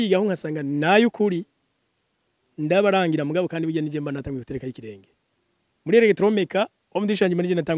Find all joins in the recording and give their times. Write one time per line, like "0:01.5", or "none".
none